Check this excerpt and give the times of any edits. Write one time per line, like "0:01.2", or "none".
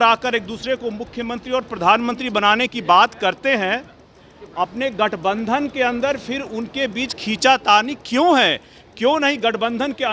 none